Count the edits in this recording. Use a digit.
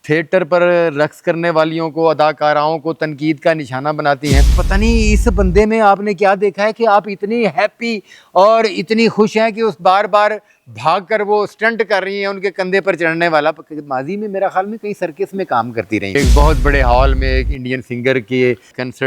2